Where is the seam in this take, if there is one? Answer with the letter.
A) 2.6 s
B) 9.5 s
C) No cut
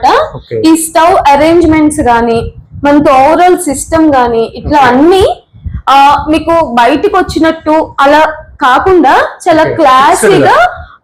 C